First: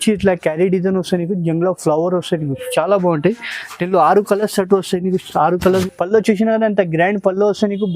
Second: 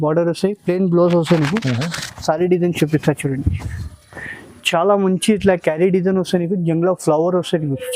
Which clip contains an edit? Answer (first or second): first